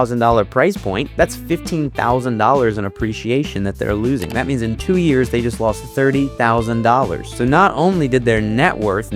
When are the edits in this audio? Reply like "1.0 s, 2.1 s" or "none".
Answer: none